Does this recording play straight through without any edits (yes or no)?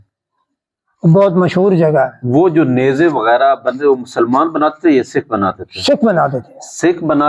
yes